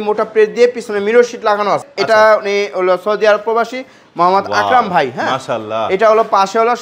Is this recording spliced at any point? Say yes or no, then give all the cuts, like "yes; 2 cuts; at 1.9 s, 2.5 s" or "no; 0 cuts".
yes; 1 cut; at 1.9 s